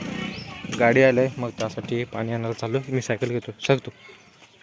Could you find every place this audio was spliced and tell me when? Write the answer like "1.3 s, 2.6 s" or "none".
none